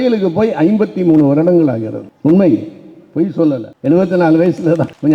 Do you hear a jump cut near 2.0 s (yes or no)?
no